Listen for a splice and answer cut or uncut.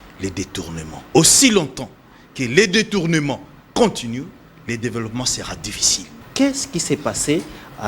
cut